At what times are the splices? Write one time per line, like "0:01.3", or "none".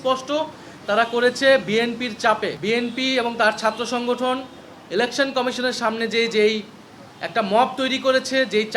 0:02.6

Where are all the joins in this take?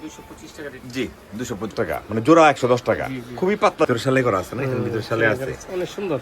0:01.7
0:03.9

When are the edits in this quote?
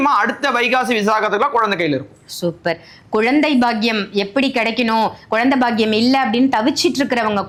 none

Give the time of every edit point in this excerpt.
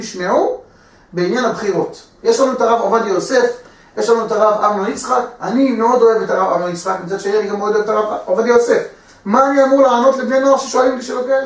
none

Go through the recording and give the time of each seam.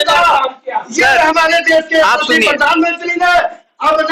none

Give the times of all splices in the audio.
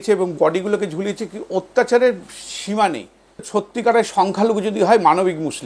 0:03.5

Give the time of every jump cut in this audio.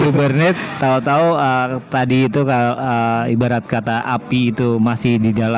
none

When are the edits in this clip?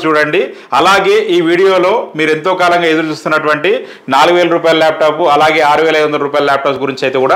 none

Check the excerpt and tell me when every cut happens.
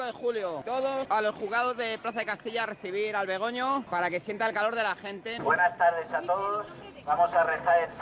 0:01.1
0:03.9
0:05.4

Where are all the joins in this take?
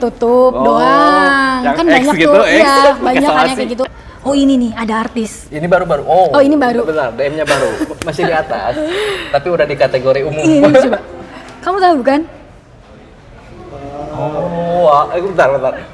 0:04.0

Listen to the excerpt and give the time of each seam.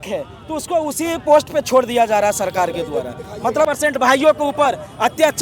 0:03.7

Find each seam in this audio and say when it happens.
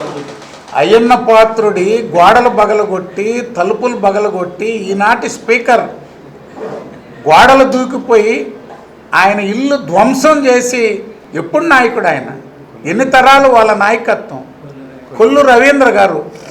0:11.2

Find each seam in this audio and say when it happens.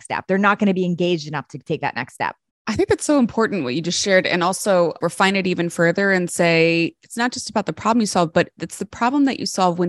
0:02.5
0:05.0

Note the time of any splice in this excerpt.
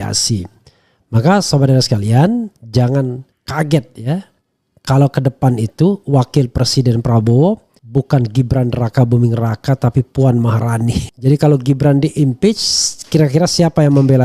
0:11.1

